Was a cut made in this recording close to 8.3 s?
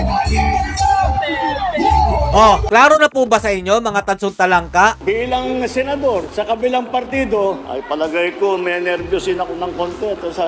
no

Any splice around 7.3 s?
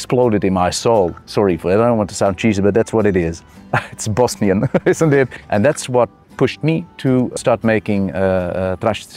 yes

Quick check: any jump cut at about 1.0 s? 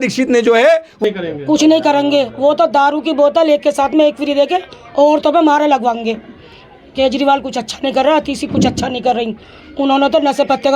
yes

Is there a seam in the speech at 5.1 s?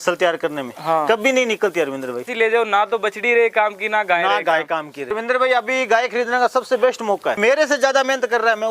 yes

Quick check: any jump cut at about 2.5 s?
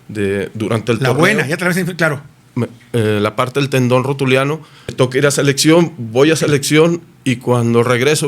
no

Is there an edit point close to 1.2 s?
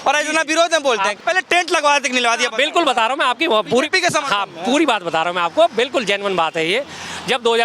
yes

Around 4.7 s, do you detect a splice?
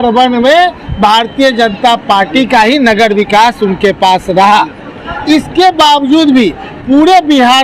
no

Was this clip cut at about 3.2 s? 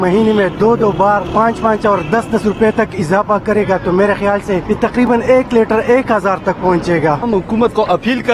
no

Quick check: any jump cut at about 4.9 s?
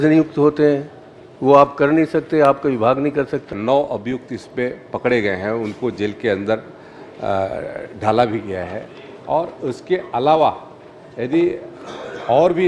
no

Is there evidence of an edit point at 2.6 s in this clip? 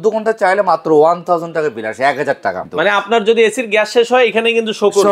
yes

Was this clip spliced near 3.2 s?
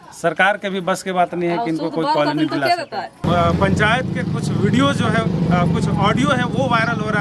yes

